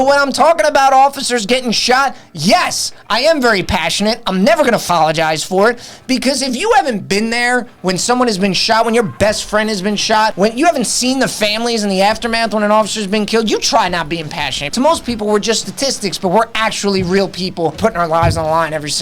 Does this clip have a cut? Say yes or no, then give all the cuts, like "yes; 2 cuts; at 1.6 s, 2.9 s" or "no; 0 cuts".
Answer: yes; 4 cuts; at 4.8 s, 10.3 s, 14.6 s, 17.8 s